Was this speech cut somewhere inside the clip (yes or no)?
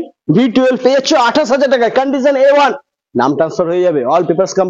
no